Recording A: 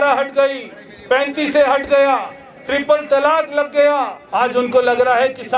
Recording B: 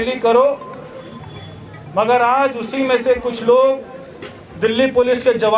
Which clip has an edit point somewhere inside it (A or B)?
A